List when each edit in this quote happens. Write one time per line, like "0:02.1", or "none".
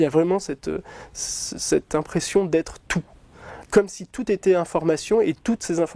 0:03.5